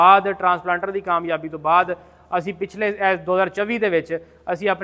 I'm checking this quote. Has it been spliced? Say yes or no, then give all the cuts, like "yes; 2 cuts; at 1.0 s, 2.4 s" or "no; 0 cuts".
no; 0 cuts